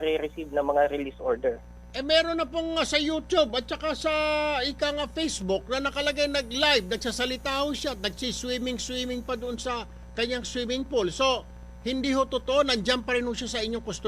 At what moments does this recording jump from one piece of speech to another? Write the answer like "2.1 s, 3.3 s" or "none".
3.5 s, 12.3 s